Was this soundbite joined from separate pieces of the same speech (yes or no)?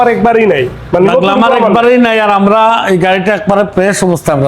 no